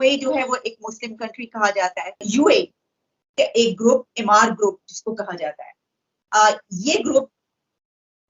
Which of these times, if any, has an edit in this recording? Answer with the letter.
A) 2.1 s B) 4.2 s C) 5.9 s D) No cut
A